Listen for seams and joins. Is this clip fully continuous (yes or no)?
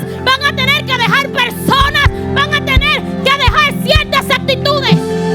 yes